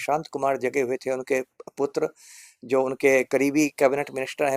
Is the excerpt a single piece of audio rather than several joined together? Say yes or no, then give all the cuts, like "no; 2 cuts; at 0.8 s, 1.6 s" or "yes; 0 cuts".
yes; 0 cuts